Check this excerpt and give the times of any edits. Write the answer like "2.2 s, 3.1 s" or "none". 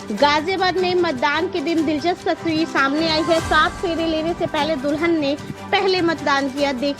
none